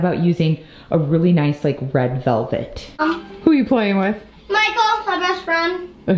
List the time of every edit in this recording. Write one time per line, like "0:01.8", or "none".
0:03.0